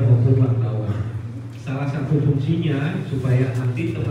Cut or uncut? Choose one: uncut